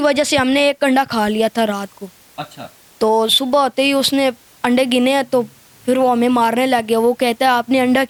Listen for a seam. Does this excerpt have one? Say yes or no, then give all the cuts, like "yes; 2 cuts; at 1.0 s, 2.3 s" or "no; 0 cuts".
no; 0 cuts